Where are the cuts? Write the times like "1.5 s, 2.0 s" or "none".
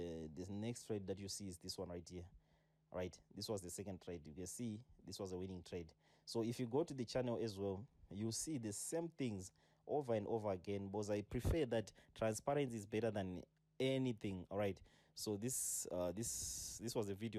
none